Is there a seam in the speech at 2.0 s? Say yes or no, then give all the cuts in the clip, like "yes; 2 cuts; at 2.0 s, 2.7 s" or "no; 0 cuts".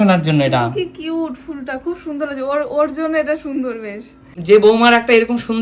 no; 1 cut; at 4.3 s